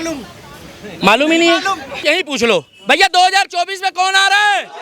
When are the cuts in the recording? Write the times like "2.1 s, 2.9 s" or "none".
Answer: 2.0 s